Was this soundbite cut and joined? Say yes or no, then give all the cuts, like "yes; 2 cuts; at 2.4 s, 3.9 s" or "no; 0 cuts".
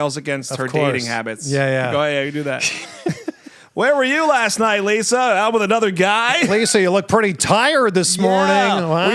no; 0 cuts